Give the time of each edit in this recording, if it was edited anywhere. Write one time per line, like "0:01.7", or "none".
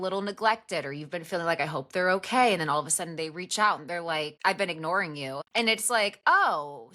0:04.3
0:05.4